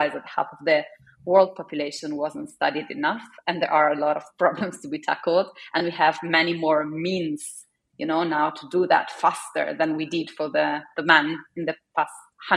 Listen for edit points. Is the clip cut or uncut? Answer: uncut